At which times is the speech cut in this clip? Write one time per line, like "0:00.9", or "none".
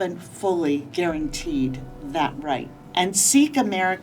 0:00.9
0:02.8